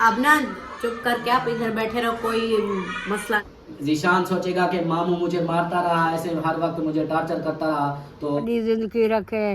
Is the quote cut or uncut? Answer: cut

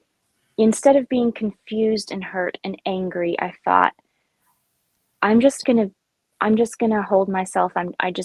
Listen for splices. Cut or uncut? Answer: uncut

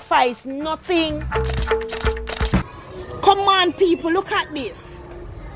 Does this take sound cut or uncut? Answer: cut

